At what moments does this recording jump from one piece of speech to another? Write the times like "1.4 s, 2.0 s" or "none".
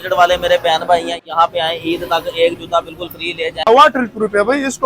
1.2 s, 3.7 s